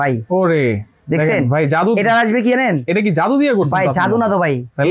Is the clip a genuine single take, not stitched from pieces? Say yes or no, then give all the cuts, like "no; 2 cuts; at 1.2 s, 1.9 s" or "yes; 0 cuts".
yes; 0 cuts